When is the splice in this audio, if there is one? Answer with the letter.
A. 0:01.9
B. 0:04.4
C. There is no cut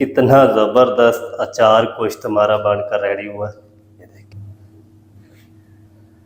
B